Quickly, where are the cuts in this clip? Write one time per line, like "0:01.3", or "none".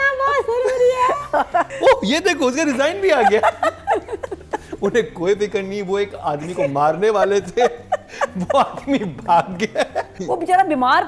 0:01.7
0:10.2